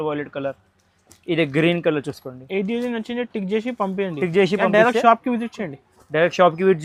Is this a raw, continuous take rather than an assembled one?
yes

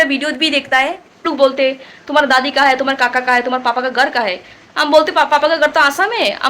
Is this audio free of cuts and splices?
no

